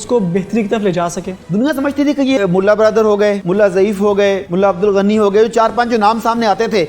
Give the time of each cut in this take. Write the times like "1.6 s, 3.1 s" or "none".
1.3 s, 2.4 s, 3.4 s, 4.5 s